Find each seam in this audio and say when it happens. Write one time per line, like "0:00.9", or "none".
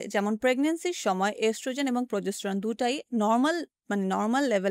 none